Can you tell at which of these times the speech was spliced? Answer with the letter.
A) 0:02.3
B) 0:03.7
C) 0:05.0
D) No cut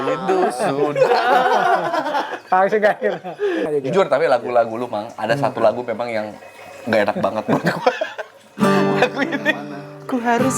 B